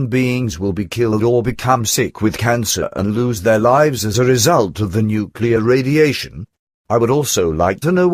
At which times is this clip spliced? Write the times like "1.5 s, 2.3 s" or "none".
none